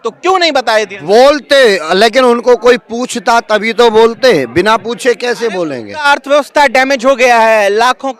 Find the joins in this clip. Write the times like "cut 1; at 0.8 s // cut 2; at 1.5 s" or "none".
cut 1; at 6.0 s